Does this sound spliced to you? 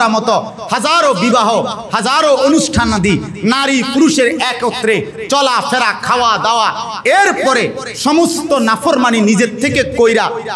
no; 0 cuts

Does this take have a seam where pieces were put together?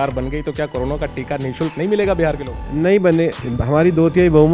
no; 0 cuts

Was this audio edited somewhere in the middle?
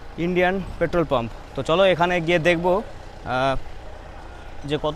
no; 0 cuts

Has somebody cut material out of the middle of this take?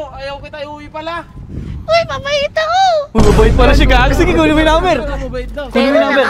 no; 0 cuts

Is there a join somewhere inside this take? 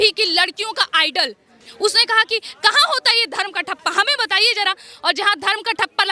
yes; 1 cut; at 1.6 s

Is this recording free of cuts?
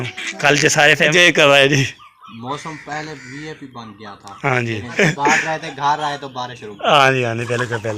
no; 2 cuts; at 1.1 s, 4.9 s

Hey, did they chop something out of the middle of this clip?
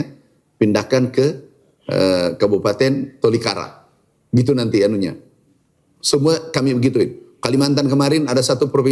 no; 0 cuts

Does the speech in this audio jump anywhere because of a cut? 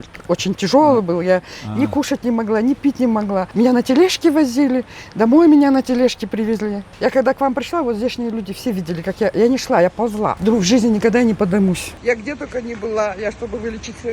yes; 4 cuts; at 3.5 s, 6.9 s, 10.4 s, 11.9 s

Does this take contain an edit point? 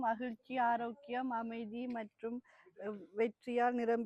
no; 0 cuts

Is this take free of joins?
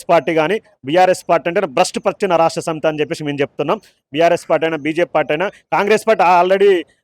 yes; 0 cuts

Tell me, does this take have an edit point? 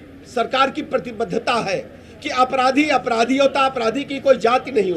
no; 0 cuts

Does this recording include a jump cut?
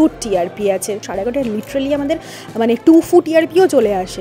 yes; 1 cut; at 1.1 s

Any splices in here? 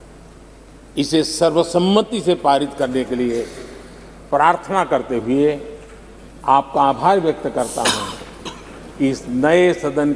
no; 0 cuts

